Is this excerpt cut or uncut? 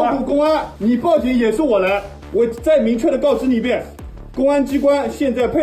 cut